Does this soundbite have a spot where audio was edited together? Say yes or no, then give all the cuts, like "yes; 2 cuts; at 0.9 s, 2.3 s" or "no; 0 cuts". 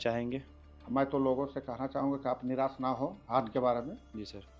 no; 0 cuts